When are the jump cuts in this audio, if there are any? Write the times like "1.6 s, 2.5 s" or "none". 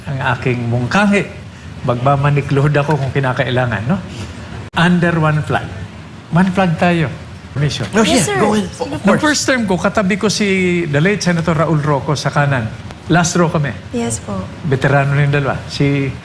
7.7 s